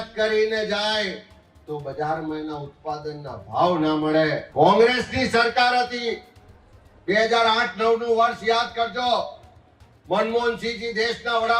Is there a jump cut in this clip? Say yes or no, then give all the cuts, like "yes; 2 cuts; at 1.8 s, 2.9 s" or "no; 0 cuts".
yes; 1 cut; at 4.4 s